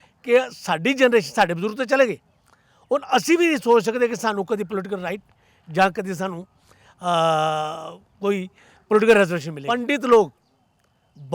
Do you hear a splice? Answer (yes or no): yes